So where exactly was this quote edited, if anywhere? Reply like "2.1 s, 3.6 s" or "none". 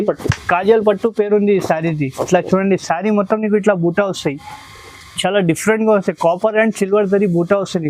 none